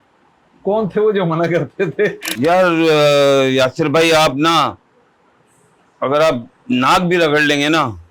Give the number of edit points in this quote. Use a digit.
1